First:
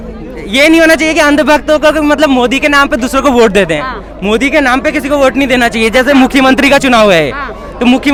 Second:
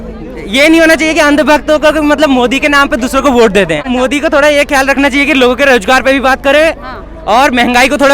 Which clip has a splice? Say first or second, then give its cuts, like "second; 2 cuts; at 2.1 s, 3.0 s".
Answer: second; 1 cut; at 3.8 s